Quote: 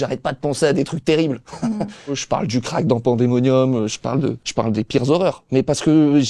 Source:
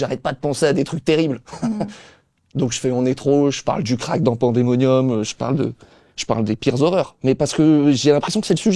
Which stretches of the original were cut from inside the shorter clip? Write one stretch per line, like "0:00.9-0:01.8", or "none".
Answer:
0:02.2-0:03.6
0:05.8-0:06.1